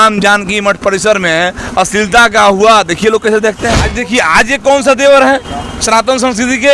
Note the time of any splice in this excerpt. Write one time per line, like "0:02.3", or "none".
0:03.9